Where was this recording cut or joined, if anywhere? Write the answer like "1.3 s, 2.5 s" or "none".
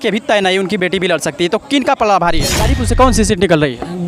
2.8 s